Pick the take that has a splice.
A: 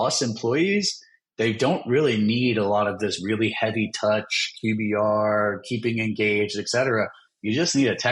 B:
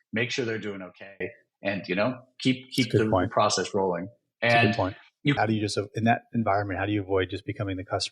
B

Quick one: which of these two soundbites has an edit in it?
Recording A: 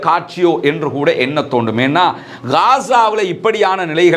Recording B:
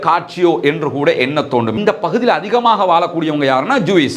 B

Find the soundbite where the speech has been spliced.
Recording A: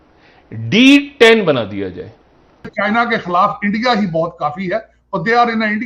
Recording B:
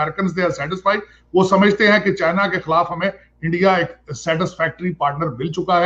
A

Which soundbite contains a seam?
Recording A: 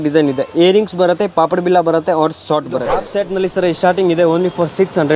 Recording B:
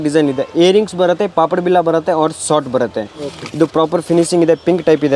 A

